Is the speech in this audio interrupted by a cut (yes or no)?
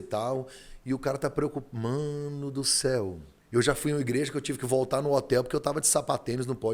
yes